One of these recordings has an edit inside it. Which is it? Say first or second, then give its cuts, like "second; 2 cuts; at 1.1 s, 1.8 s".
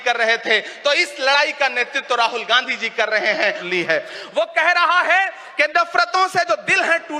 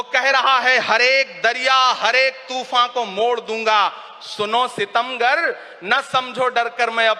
first; 1 cut; at 3.7 s